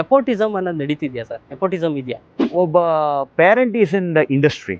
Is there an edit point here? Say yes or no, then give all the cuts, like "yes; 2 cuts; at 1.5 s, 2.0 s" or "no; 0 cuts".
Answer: yes; 1 cut; at 2.3 s